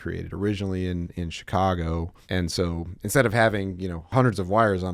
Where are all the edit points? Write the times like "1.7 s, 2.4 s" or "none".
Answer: 2.2 s, 4.0 s